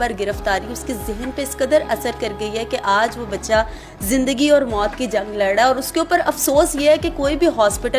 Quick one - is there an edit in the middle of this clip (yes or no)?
no